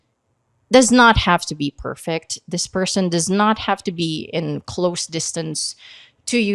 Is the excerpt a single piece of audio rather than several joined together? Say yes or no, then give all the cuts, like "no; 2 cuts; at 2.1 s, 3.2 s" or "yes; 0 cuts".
yes; 0 cuts